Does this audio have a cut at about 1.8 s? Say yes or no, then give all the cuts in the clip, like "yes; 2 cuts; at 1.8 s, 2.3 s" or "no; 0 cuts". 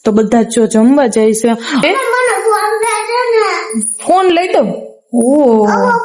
yes; 1 cut; at 1.8 s